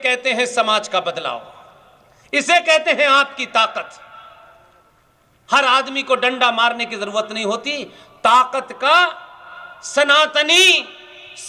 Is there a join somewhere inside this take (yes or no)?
no